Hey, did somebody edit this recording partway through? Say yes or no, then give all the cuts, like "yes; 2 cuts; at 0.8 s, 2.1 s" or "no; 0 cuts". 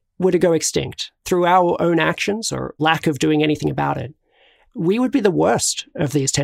yes; 2 cuts; at 1.2 s, 2.7 s